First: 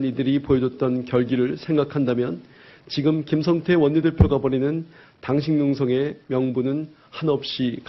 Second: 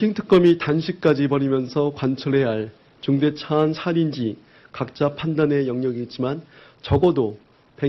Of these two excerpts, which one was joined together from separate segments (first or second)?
second